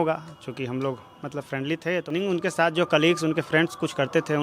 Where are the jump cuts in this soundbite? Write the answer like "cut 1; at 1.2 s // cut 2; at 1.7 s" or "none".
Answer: cut 1; at 2.1 s